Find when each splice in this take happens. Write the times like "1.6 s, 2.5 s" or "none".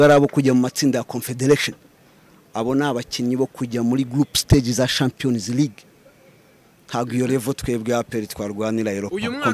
none